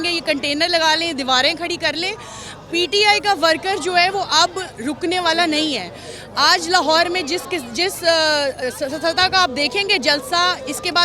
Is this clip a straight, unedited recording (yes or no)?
yes